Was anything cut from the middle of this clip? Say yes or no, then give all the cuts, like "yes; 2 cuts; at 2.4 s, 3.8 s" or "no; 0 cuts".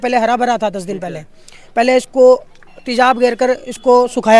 no; 0 cuts